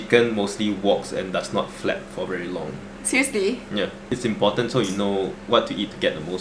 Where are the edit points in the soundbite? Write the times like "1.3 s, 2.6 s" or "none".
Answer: 4.0 s, 5.4 s

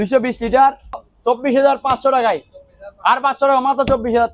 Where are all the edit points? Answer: 1.1 s

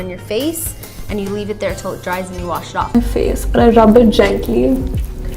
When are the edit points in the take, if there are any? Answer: 2.9 s

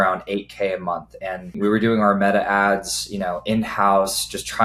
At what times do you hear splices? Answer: none

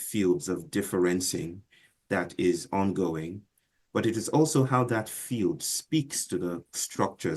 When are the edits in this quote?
3.8 s

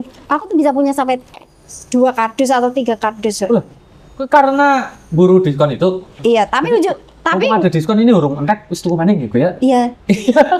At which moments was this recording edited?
none

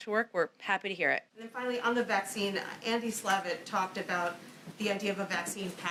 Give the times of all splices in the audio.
none

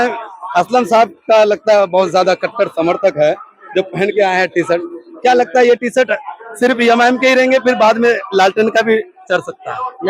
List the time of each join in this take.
none

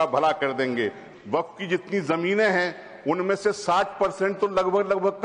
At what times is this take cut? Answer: 1.0 s

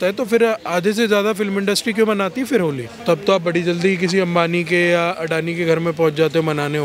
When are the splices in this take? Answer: none

